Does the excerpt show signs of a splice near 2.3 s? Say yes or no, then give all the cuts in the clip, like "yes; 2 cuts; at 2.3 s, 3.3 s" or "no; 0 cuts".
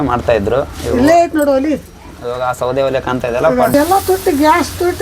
no; 1 cut; at 3.7 s